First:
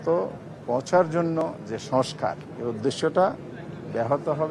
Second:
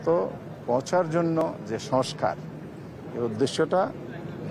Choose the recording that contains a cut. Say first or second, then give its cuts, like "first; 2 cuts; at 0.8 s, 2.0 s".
first; 1 cut; at 2.5 s